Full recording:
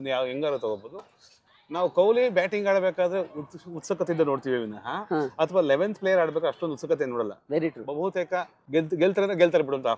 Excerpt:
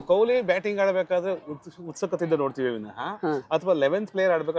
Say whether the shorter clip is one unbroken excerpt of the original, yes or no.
yes